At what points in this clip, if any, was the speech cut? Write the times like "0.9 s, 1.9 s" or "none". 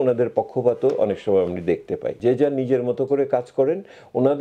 2.2 s